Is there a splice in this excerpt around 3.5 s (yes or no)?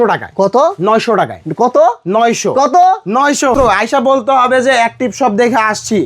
yes